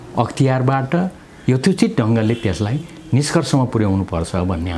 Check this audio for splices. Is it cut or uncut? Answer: uncut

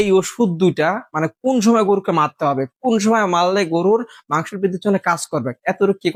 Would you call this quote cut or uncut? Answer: uncut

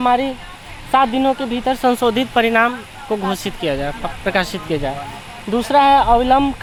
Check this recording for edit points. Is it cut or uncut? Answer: uncut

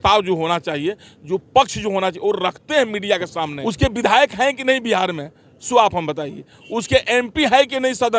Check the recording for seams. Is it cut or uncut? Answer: cut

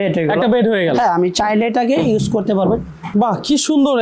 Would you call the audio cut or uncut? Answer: cut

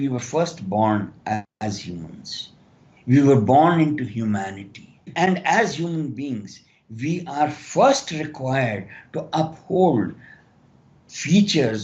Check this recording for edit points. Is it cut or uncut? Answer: cut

